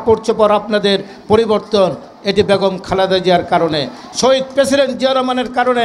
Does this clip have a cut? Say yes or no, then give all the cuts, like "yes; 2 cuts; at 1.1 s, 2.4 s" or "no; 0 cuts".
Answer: no; 0 cuts